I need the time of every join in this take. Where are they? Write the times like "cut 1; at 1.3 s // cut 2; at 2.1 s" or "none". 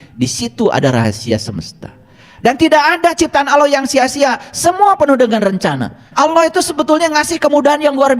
cut 1; at 6.0 s